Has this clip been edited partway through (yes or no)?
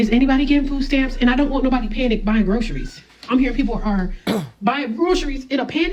no